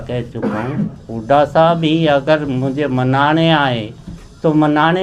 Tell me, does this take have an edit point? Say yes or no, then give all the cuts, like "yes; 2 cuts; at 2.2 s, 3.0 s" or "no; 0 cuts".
yes; 1 cut; at 1.0 s